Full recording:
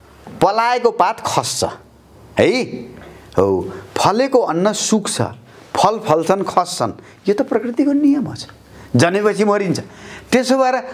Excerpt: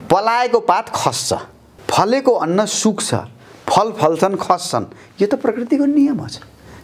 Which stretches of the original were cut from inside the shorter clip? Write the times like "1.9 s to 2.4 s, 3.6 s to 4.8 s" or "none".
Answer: 2.0 s to 3.8 s